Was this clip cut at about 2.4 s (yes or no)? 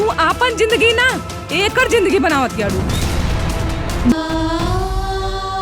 no